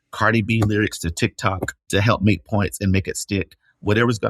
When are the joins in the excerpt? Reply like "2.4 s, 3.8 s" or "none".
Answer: 1.7 s